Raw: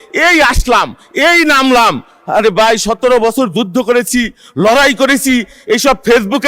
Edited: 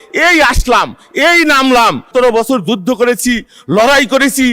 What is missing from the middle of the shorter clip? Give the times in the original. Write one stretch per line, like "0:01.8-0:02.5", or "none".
0:02.1-0:03.0